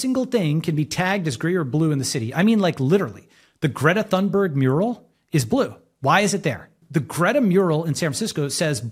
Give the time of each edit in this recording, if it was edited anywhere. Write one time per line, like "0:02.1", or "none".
0:06.8